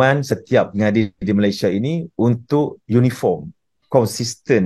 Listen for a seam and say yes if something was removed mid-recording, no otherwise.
no